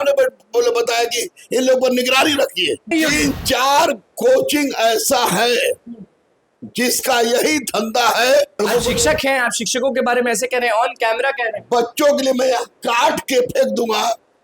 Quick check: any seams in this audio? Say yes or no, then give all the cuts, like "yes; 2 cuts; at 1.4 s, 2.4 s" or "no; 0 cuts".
yes; 2 cuts; at 2.9 s, 8.6 s